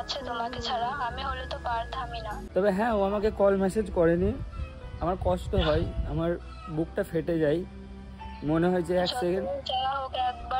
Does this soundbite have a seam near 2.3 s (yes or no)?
yes